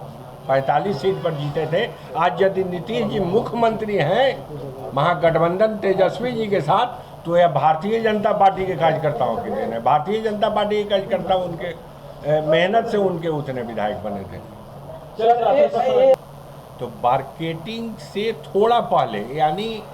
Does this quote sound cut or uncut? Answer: cut